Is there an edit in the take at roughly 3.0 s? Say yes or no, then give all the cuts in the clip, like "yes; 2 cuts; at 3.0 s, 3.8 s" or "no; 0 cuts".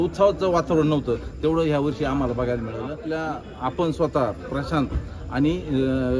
yes; 1 cut; at 3.0 s